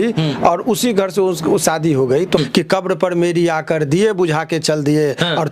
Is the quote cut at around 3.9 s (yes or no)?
no